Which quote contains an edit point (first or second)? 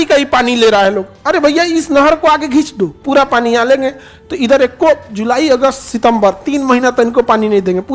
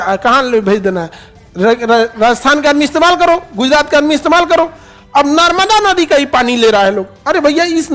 first